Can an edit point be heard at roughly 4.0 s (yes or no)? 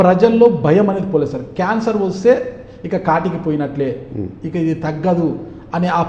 no